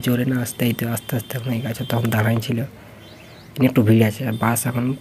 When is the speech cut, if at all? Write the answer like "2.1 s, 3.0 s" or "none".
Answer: none